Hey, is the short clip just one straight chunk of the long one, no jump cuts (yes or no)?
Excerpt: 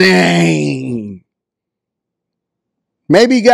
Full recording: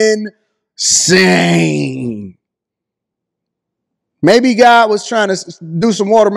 yes